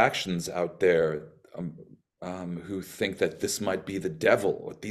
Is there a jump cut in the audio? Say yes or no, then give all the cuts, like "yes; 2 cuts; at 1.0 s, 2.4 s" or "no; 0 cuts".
no; 0 cuts